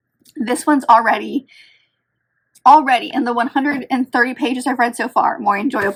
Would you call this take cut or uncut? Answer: uncut